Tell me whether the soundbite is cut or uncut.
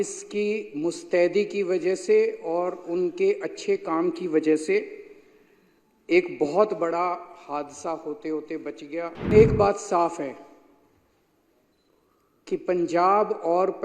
cut